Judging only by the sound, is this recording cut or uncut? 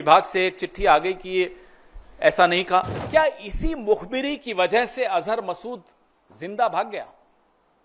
cut